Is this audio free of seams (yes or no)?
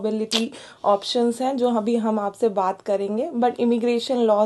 yes